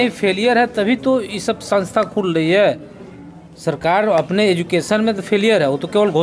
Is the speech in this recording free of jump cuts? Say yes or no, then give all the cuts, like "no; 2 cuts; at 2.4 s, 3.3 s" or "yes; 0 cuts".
yes; 0 cuts